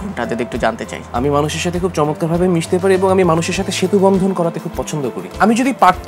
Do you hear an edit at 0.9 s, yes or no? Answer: yes